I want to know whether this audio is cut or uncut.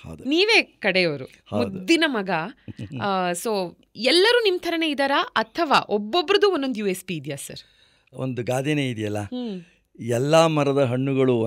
uncut